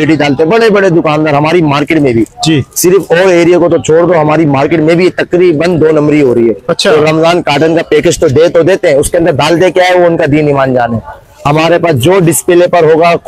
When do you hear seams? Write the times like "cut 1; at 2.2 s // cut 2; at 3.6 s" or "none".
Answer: none